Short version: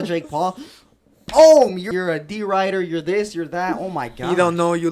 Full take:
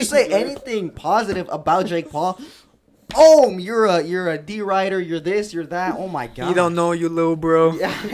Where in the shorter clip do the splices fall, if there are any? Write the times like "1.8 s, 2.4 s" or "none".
1.9 s